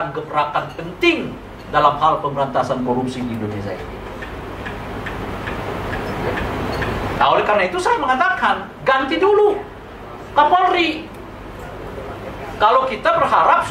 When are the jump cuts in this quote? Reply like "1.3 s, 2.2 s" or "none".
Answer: none